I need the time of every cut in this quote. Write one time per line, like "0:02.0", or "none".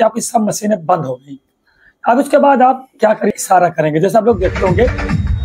0:03.3